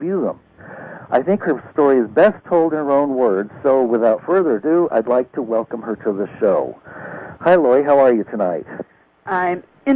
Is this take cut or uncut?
uncut